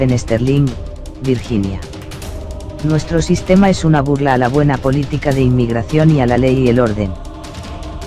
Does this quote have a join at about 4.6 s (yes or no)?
no